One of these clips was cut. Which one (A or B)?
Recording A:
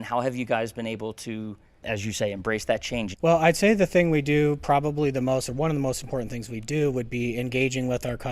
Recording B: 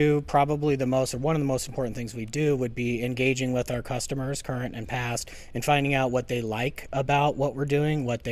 A